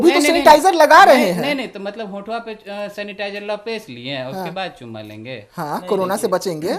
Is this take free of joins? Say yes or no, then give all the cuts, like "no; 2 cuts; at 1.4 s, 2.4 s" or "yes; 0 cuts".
yes; 0 cuts